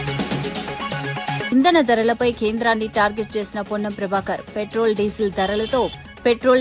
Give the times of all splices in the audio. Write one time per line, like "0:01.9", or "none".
none